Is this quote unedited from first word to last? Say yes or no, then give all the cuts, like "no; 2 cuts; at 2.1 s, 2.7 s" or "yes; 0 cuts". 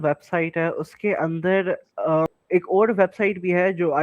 no; 1 cut; at 2.4 s